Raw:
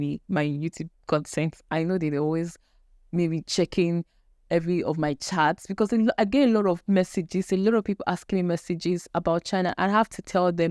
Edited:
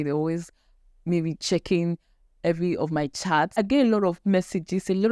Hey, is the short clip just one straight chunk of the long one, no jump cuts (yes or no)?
no